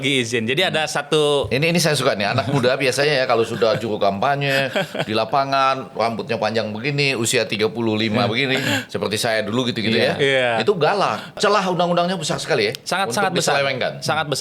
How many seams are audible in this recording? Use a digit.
1